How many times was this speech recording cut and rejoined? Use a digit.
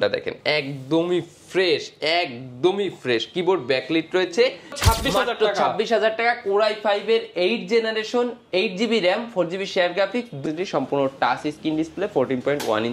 2